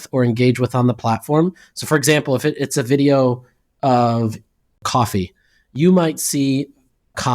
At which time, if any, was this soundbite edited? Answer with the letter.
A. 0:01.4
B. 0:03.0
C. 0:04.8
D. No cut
C